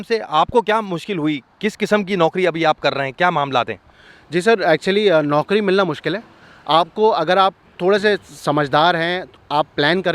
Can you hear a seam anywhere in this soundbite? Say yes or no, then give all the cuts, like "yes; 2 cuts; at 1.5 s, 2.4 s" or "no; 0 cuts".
no; 0 cuts